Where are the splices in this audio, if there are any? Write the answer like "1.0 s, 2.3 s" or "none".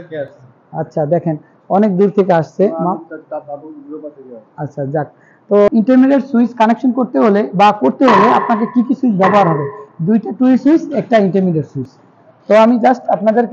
5.7 s